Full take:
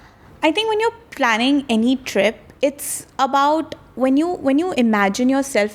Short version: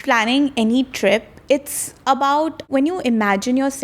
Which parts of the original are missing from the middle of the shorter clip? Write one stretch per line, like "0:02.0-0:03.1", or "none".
0:03.8-0:04.4